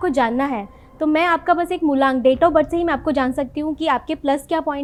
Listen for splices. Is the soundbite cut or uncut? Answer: uncut